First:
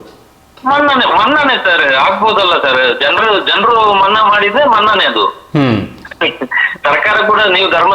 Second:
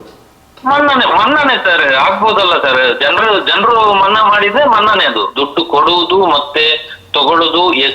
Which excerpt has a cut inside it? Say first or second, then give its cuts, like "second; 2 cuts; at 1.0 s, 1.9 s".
second; 1 cut; at 5.3 s